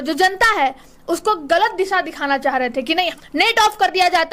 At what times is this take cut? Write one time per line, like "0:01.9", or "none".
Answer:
0:03.1